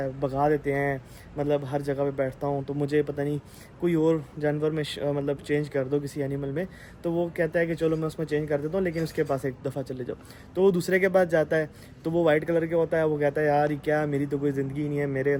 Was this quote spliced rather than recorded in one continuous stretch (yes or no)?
no